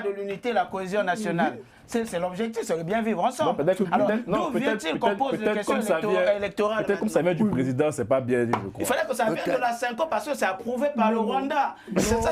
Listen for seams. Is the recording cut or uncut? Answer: uncut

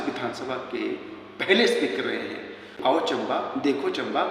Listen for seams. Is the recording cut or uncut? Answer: cut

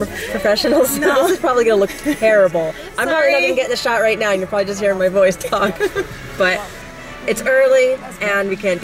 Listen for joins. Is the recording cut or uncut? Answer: cut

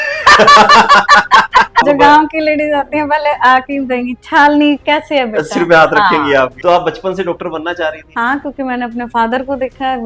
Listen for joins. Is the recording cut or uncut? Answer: cut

